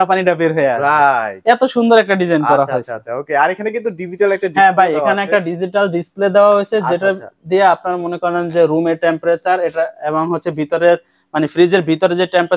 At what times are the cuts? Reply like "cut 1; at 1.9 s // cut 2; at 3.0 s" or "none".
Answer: none